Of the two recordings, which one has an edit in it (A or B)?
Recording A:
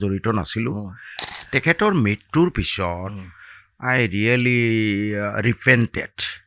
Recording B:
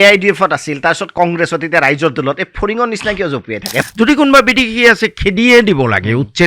B